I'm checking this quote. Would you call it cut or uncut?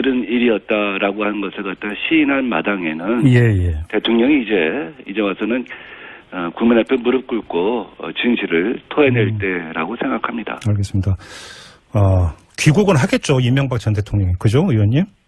uncut